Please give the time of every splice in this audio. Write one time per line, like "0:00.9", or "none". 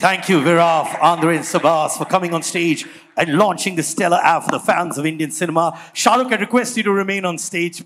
none